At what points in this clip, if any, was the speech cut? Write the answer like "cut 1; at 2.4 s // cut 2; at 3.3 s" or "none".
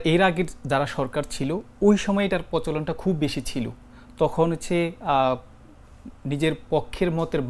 none